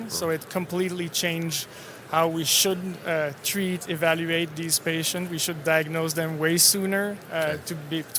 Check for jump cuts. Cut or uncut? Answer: uncut